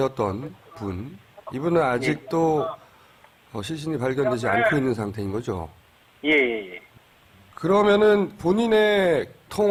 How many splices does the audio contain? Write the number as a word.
zero